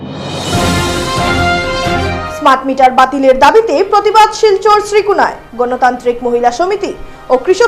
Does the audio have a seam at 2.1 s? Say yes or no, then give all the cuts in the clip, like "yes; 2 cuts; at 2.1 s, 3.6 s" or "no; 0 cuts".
yes; 1 cut; at 2.1 s